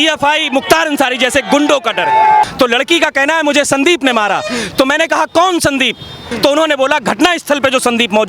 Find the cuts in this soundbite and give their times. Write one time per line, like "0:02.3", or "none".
0:02.4
0:06.2